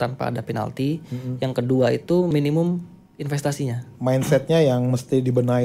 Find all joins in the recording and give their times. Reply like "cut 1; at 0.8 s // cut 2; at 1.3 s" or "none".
cut 1; at 2.3 s // cut 2; at 3.8 s